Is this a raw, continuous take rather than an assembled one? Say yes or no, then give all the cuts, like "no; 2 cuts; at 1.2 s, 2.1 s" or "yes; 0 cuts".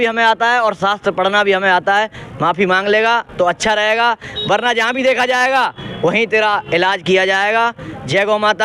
yes; 0 cuts